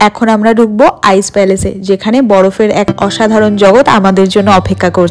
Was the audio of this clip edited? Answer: no; 0 cuts

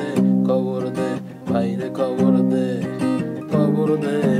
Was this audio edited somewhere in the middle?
no; 0 cuts

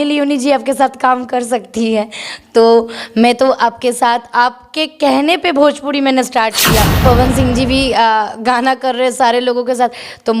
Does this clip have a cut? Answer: yes; 1 cut; at 7.0 s

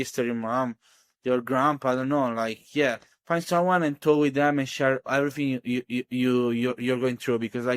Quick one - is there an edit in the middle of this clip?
no; 0 cuts

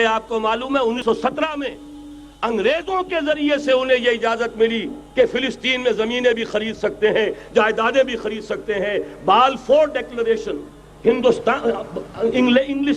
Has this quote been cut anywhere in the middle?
yes; 1 cut; at 1.0 s

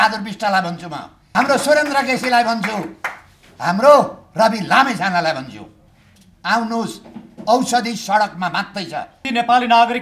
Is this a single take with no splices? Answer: no; 2 cuts; at 1.1 s, 9.2 s

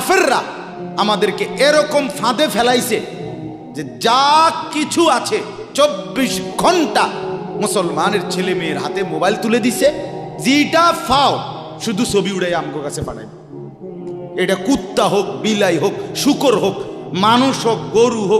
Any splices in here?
no; 0 cuts

